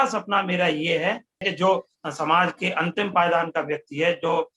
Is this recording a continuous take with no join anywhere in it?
no; 1 cut; at 1.5 s

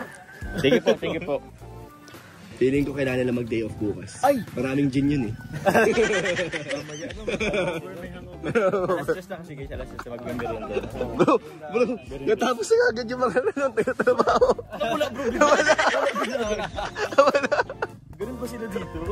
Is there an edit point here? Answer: yes; 1 cut; at 8.8 s

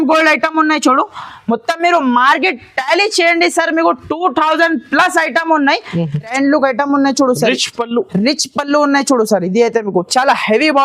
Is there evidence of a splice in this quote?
yes; 1 cut; at 6.3 s

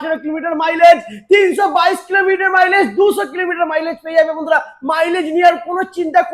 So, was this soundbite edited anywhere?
no; 0 cuts

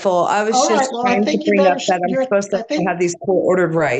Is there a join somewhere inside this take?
no; 0 cuts

